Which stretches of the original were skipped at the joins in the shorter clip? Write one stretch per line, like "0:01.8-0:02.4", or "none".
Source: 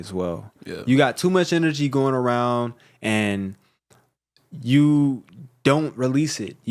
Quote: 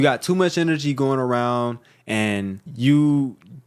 0:03.6-0:04.5